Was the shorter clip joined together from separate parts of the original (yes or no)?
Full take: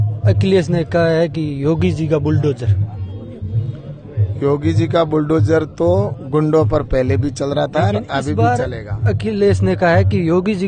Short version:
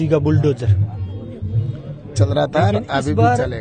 yes